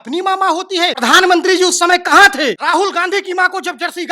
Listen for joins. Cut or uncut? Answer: cut